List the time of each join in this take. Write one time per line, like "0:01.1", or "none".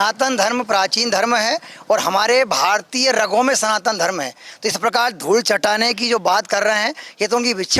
none

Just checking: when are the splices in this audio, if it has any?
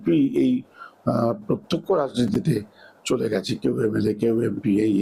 none

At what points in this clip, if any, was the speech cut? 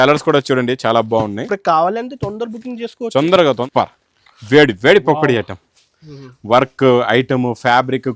0:03.6

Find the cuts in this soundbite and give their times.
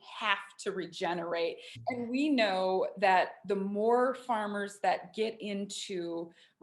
0:01.8

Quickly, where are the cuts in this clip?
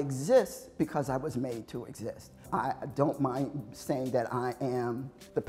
0:02.3

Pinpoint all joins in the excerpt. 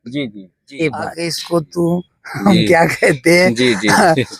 0:01.3

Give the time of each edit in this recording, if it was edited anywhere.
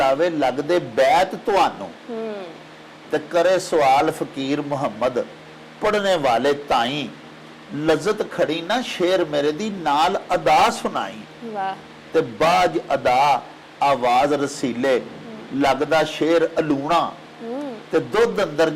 none

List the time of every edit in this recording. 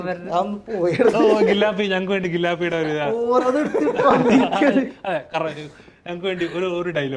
none

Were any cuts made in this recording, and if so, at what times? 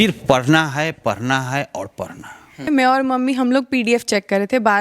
0:02.6

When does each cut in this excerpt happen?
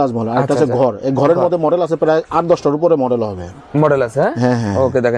none

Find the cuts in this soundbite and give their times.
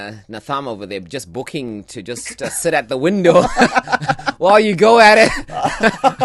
none

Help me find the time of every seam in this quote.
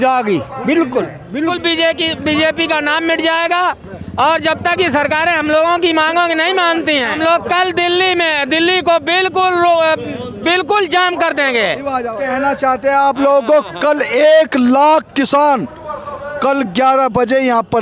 0:01.4
0:12.2

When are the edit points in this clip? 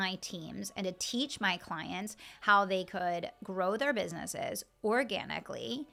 none

